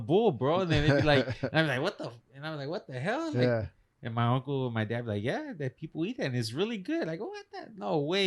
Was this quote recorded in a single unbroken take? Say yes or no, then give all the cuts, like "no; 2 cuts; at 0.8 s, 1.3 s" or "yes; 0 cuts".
yes; 0 cuts